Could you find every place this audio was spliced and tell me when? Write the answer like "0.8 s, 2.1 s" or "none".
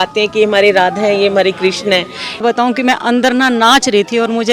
2.4 s